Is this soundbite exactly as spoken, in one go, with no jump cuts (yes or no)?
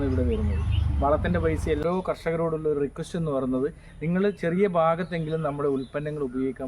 no